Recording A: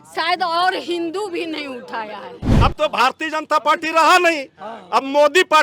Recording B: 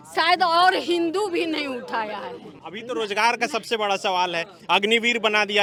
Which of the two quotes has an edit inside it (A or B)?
A